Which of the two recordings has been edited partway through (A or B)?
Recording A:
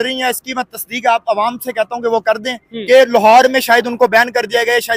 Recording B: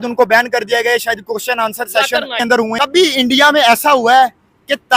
B